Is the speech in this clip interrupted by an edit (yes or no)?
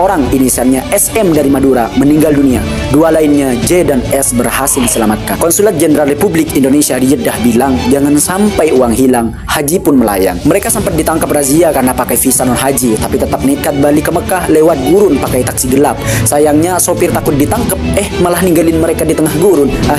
no